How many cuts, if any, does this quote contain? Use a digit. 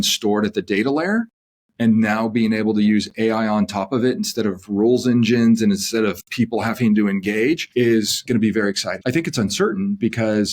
2